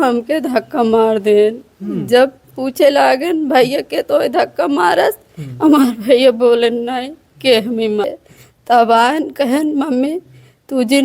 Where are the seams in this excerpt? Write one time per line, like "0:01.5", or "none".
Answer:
0:08.1